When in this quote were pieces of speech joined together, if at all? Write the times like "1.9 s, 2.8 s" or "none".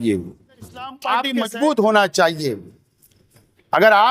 1.0 s